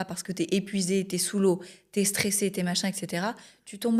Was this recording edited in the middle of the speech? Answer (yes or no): no